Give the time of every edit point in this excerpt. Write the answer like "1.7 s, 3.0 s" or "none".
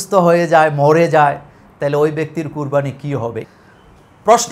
3.4 s